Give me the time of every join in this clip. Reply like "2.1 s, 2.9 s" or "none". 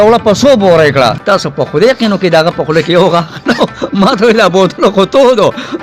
1.2 s